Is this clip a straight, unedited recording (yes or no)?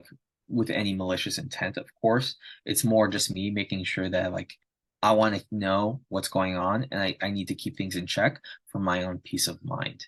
yes